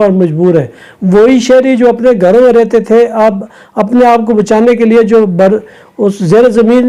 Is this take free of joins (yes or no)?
yes